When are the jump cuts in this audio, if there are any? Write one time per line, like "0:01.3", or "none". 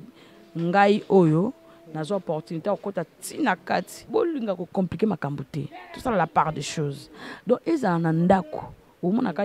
0:04.1